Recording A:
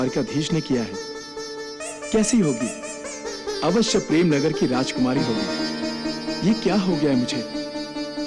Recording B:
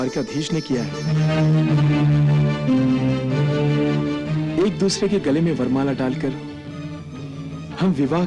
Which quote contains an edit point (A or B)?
B